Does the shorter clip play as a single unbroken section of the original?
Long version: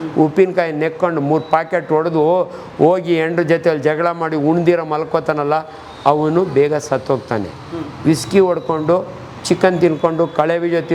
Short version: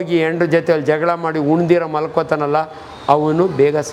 yes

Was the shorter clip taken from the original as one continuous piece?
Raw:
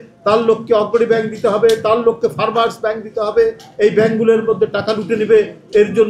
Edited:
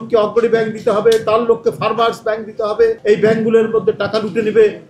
no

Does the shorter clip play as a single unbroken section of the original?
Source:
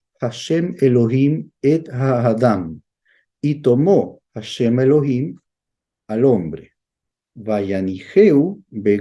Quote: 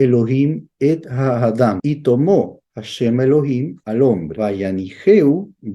no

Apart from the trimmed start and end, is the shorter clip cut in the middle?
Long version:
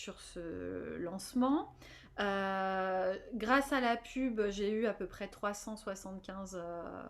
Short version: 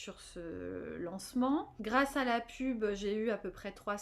yes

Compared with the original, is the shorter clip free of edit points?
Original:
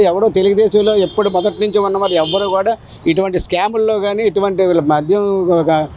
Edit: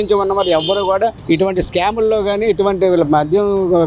no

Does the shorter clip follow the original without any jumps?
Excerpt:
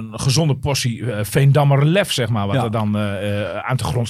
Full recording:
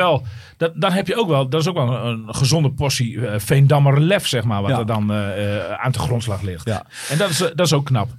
yes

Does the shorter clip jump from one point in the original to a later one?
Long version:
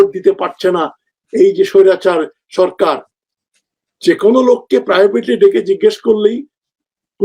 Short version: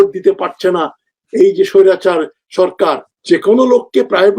yes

